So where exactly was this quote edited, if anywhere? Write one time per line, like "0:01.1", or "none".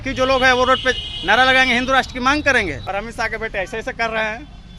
0:02.8